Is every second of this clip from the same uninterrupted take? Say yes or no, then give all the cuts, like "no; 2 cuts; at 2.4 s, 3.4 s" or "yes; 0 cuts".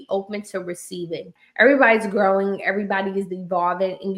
no; 1 cut; at 1.4 s